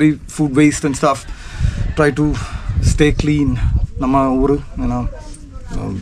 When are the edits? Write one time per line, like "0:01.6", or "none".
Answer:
none